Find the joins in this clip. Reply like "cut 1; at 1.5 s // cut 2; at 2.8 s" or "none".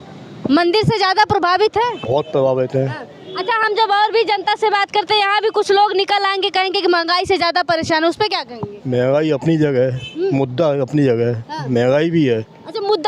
none